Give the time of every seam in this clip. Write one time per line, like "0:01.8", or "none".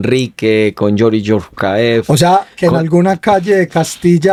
none